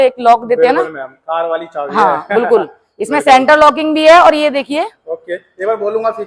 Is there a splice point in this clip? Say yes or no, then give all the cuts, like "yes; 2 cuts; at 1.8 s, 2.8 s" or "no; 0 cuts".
no; 0 cuts